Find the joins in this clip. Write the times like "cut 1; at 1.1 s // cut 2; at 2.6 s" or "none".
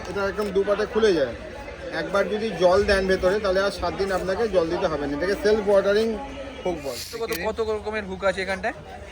cut 1; at 7.2 s

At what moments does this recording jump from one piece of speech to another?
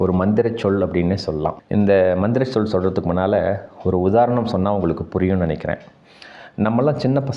none

